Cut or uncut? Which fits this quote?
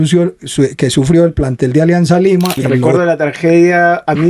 cut